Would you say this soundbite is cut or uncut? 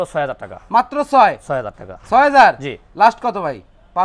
uncut